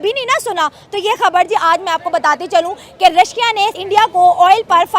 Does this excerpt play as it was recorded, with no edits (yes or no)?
no